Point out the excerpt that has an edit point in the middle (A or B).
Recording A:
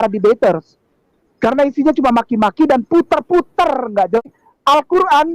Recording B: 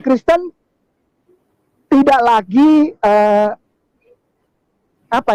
A